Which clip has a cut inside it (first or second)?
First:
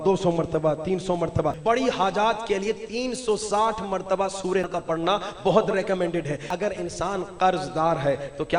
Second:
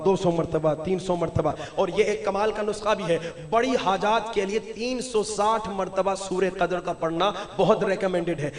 first